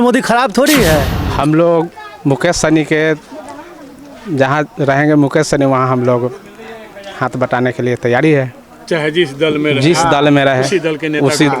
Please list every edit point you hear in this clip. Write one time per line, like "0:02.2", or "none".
0:01.2